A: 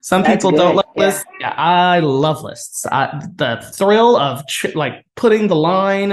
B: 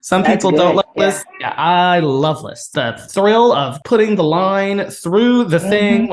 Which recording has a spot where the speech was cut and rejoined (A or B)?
B